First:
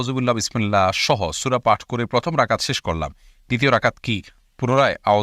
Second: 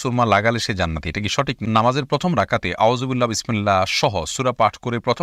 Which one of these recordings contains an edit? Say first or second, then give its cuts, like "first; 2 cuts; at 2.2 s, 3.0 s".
second; 1 cut; at 1.6 s